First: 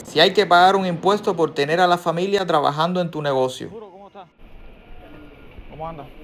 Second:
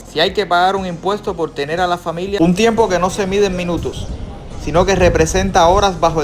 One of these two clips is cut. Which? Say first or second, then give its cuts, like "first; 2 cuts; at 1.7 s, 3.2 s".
second; 1 cut; at 2.4 s